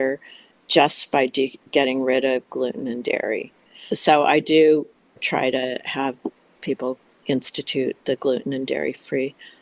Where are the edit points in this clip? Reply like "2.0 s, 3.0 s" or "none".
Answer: 1.6 s, 3.9 s, 5.2 s, 7.1 s